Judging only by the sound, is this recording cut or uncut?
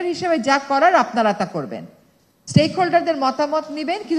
uncut